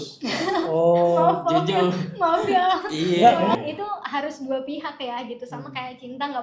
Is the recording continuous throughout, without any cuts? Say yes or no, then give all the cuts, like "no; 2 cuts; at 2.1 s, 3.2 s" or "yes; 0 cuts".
no; 1 cut; at 3.6 s